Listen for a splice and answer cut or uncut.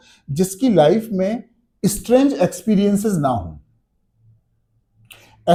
uncut